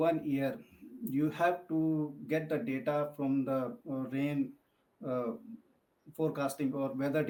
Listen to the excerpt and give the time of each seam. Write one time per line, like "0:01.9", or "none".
none

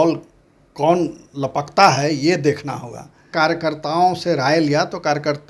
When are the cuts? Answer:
0:03.3

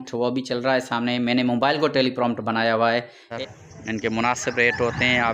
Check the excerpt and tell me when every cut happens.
0:03.4

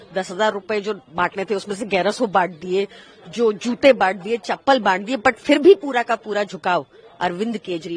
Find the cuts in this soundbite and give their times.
none

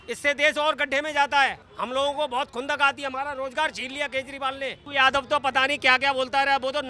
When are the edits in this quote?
0:01.7
0:04.8

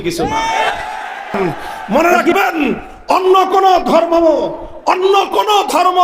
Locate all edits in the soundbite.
0:01.3

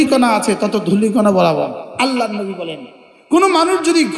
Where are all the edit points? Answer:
0:01.8

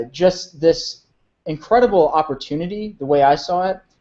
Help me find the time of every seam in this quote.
0:02.8

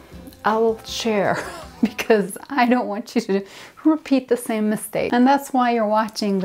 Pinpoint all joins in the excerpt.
0:05.1

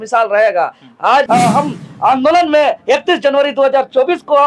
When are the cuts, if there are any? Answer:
0:01.3

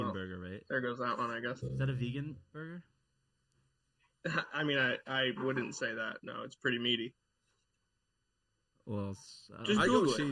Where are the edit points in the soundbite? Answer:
none

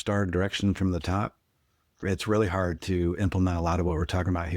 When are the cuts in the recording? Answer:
0:01.9
0:02.8

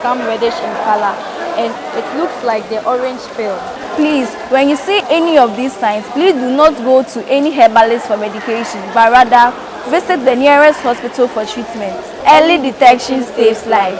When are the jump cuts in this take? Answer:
0:01.7
0:03.8
0:05.0
0:12.1

